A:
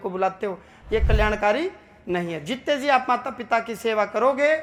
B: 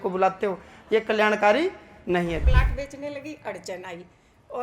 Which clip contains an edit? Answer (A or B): B